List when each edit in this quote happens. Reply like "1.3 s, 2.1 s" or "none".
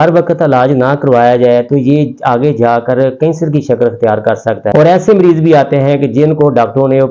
4.7 s